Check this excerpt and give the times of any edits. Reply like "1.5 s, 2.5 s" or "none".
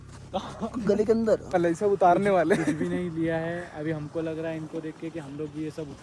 1.5 s